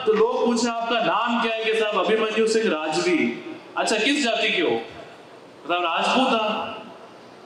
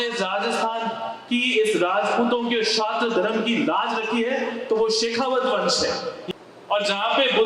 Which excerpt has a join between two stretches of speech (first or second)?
second